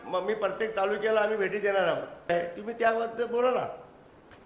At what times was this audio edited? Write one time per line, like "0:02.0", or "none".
0:02.3